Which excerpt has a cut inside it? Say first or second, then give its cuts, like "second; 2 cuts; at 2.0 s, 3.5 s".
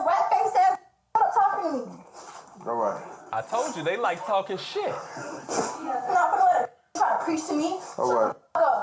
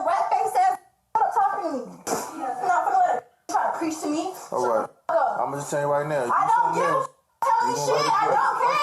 second; 1 cut; at 1.9 s